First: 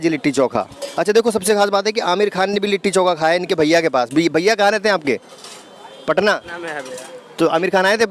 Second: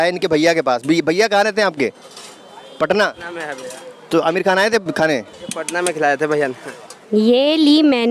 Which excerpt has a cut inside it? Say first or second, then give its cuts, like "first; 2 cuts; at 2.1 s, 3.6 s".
second; 1 cut; at 7.0 s